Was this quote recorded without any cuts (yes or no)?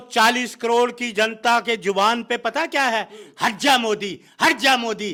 yes